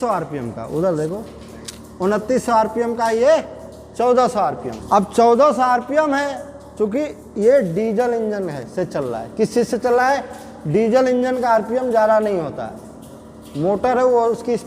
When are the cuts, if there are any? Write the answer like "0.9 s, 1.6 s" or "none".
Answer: 4.7 s